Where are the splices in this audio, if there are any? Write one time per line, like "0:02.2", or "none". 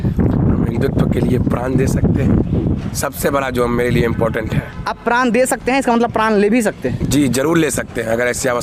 none